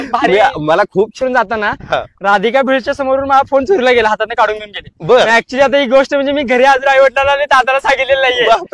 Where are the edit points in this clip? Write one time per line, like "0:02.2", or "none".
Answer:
0:01.1